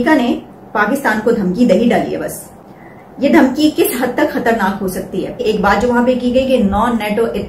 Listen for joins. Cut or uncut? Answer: cut